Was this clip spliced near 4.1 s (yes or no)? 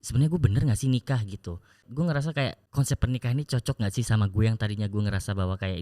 no